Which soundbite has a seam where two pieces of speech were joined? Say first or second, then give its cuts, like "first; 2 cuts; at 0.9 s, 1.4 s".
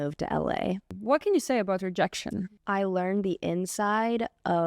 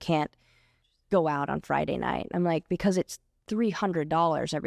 first; 2 cuts; at 0.9 s, 2.5 s